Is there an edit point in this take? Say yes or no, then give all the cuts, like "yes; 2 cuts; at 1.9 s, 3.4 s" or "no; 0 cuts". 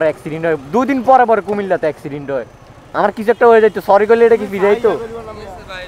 yes; 1 cut; at 2.9 s